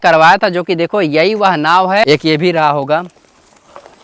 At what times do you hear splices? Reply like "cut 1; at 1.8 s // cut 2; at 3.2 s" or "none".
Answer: cut 1; at 2.0 s